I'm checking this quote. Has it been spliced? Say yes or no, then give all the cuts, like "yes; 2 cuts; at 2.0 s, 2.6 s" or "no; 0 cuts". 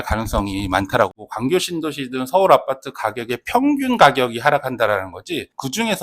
yes; 1 cut; at 1.2 s